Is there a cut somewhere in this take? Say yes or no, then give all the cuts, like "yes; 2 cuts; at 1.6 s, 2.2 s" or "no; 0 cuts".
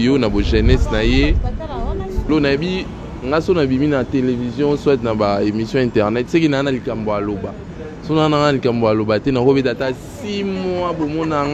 yes; 1 cut; at 2.3 s